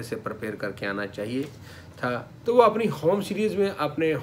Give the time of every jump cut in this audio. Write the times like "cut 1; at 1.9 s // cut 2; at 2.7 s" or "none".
cut 1; at 2.3 s